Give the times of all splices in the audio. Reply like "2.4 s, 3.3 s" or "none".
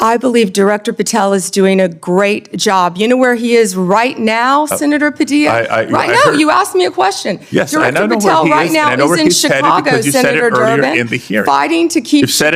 none